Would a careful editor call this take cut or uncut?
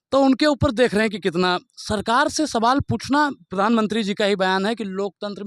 uncut